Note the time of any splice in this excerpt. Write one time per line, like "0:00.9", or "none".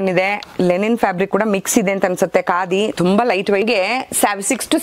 0:03.6